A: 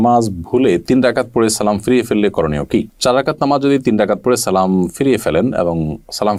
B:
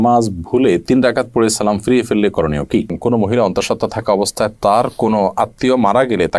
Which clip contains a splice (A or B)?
B